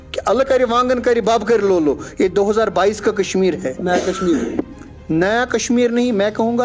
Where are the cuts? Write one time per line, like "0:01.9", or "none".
none